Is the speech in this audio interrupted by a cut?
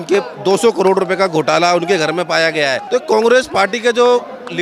yes; 1 cut; at 2.8 s

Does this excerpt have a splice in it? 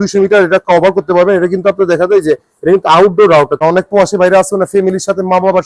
yes; 1 cut; at 3.6 s

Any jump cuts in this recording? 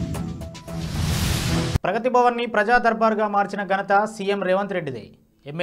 yes; 1 cut; at 1.8 s

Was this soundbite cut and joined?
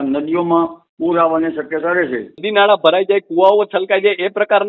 yes; 1 cut; at 2.4 s

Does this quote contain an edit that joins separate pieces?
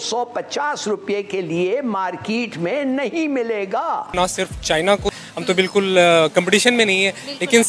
yes; 2 cuts; at 4.1 s, 5.1 s

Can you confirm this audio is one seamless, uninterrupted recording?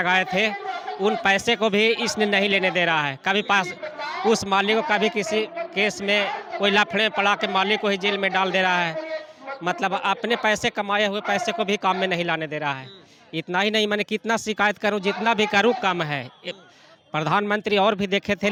yes; 0 cuts

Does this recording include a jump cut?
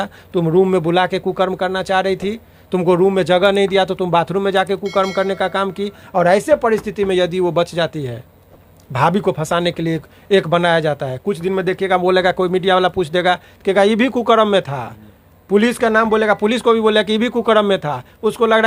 no; 0 cuts

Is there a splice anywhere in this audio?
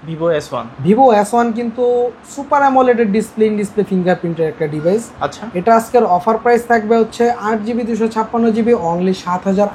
no; 0 cuts

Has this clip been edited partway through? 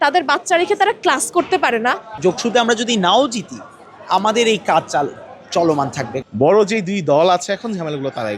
yes; 2 cuts; at 2.1 s, 6.2 s

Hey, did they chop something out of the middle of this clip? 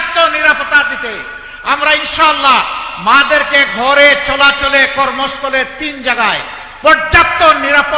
no; 0 cuts

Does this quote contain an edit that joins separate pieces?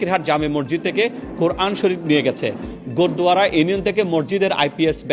no; 0 cuts

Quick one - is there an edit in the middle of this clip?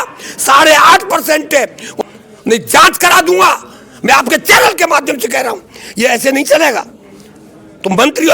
yes; 1 cut; at 2.0 s

